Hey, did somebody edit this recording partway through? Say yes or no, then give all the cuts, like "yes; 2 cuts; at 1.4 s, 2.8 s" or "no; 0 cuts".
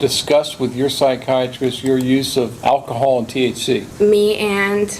yes; 2 cuts; at 2.5 s, 3.9 s